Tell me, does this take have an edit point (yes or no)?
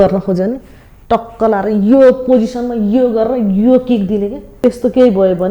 yes